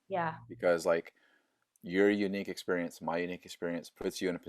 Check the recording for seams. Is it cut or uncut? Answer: uncut